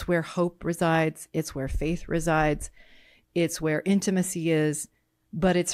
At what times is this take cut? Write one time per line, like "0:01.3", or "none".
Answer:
none

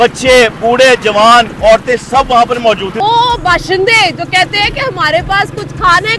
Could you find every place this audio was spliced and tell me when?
0:03.0

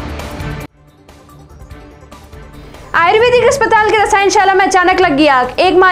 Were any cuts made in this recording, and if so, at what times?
0:01.6
0:02.5

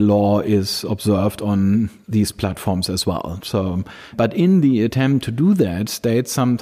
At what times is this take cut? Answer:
0:02.0
0:04.2

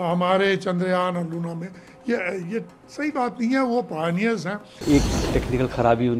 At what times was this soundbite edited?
0:04.8

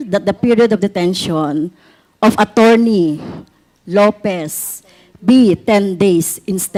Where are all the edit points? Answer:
none

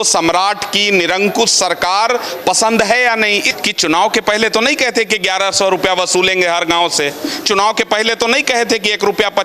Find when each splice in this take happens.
0:03.5

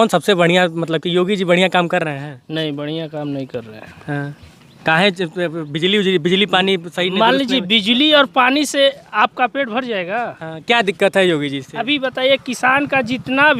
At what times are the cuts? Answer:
none

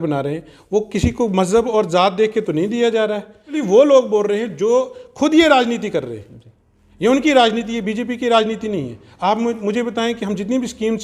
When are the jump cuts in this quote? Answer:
0:03.6

